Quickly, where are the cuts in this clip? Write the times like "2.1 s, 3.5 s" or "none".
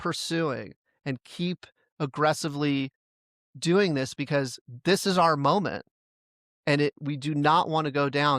7.0 s